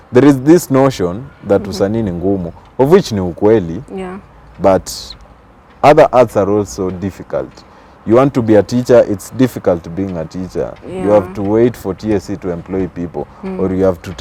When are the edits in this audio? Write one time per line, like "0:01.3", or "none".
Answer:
none